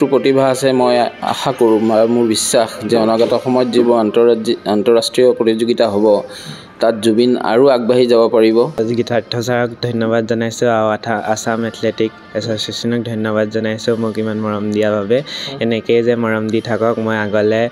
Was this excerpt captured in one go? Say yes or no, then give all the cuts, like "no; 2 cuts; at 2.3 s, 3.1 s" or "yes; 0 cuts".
no; 1 cut; at 8.8 s